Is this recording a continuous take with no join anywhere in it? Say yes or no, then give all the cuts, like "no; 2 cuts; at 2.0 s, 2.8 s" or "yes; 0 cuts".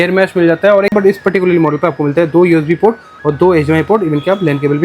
no; 1 cut; at 0.9 s